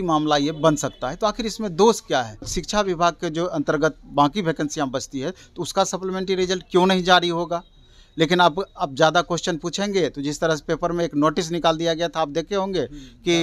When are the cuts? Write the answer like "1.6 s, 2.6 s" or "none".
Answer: 2.6 s